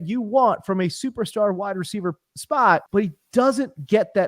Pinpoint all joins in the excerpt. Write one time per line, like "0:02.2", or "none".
0:02.9